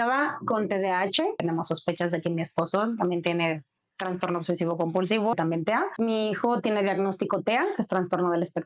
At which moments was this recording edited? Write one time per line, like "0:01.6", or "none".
0:01.4
0:05.3